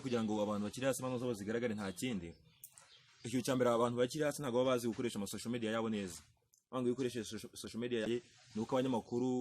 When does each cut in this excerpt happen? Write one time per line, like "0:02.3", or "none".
0:08.1

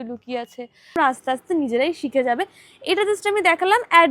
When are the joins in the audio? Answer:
0:01.0

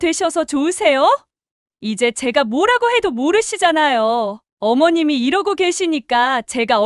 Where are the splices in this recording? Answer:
0:04.4

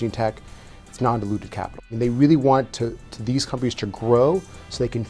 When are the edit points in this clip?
0:01.8

